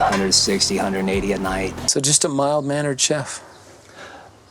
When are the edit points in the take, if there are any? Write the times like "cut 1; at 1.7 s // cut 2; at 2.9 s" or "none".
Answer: cut 1; at 1.8 s